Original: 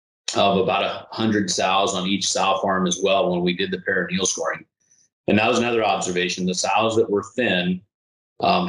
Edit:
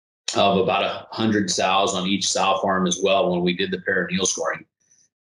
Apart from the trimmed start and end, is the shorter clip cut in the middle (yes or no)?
no